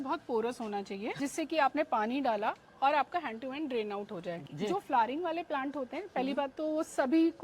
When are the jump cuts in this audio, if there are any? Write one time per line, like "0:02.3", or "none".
0:01.1
0:04.4